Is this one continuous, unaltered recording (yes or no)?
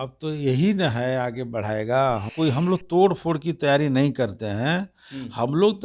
no